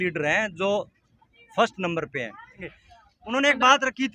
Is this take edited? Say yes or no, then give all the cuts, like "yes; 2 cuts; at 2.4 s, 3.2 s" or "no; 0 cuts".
yes; 1 cut; at 2.6 s